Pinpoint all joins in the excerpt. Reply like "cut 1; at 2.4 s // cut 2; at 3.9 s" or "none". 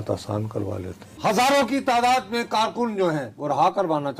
cut 1; at 1.1 s // cut 2; at 3.3 s